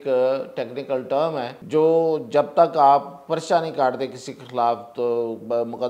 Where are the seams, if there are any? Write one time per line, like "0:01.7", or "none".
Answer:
0:01.6